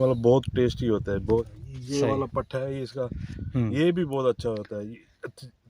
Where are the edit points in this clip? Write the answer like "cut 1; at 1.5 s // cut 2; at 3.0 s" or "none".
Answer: cut 1; at 1.5 s